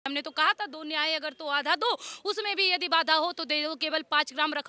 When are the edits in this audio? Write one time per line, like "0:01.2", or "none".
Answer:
none